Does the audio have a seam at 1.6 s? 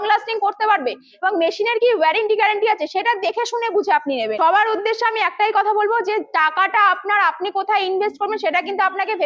no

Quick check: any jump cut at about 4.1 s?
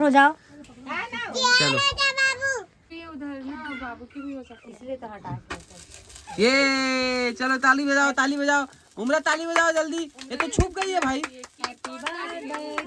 no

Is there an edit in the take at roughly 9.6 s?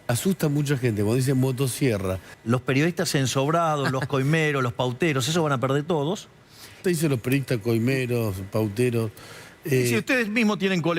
no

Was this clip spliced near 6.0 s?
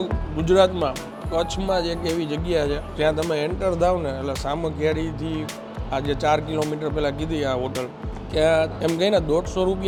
no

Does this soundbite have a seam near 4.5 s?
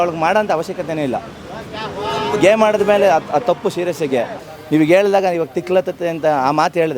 yes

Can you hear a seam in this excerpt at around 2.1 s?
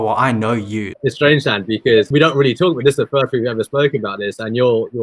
yes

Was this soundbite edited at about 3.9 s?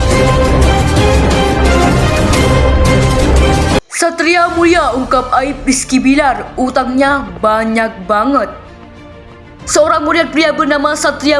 yes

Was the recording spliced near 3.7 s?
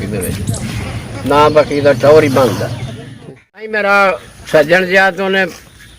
yes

